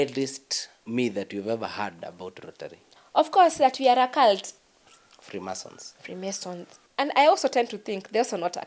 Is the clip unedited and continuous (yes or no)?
no